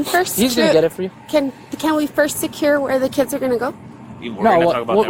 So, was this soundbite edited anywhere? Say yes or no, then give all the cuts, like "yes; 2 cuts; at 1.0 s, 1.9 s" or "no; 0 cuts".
no; 0 cuts